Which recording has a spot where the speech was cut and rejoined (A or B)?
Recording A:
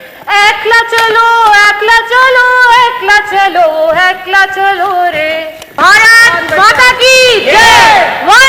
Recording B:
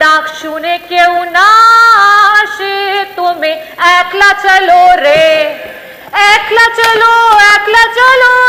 A